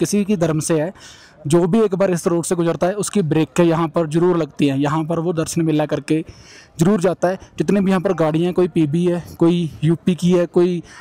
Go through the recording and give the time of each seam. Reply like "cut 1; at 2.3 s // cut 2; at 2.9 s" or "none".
none